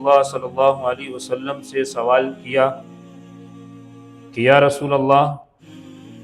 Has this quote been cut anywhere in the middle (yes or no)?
no